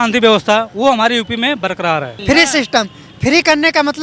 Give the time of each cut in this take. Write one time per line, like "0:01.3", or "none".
0:02.1